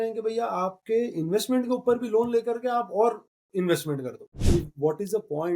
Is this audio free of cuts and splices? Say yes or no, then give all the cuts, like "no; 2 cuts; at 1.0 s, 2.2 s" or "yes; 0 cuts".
no; 1 cut; at 4.4 s